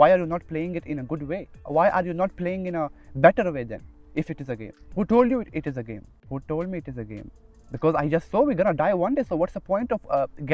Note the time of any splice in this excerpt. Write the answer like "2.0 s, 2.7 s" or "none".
1.6 s, 4.8 s, 6.1 s